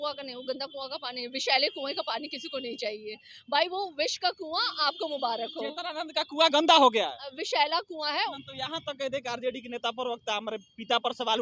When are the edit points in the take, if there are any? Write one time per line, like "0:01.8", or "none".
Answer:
0:08.4